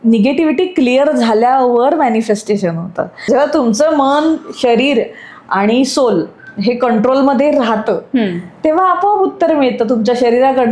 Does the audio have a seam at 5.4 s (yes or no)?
no